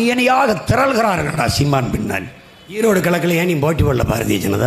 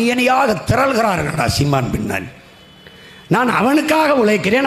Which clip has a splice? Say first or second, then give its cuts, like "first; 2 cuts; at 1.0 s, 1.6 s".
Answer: first; 1 cut; at 2.8 s